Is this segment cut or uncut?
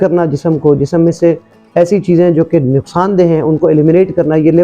uncut